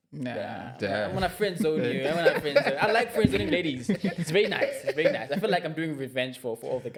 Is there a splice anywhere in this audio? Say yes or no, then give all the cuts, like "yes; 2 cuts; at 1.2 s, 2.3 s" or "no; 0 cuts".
no; 0 cuts